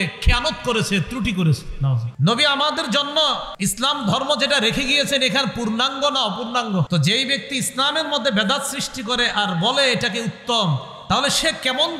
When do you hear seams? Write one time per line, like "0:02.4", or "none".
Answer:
0:02.1
0:03.5
0:06.9